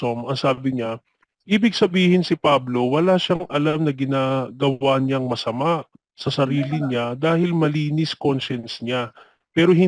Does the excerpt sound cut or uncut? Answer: uncut